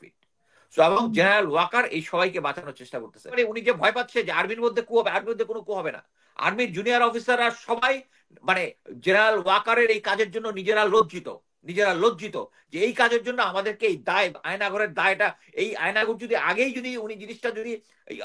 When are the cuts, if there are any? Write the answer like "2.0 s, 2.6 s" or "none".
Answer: 3.4 s